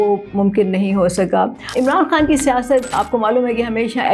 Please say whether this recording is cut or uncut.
cut